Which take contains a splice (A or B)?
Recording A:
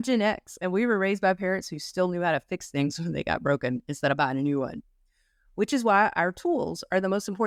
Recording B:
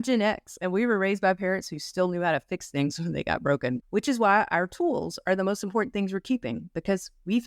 B